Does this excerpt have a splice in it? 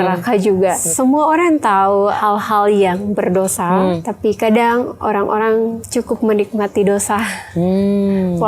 yes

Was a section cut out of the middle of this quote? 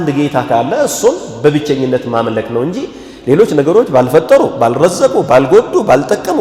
no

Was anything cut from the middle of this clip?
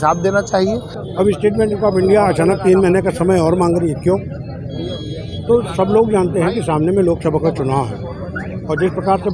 yes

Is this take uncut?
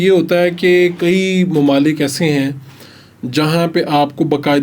yes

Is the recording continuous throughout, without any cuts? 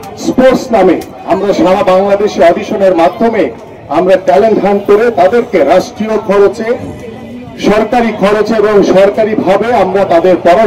yes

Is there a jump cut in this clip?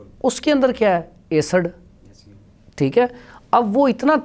no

